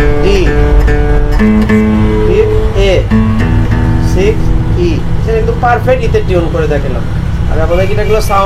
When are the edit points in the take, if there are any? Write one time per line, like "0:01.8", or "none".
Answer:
none